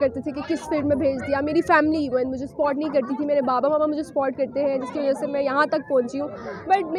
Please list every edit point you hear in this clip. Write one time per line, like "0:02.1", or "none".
none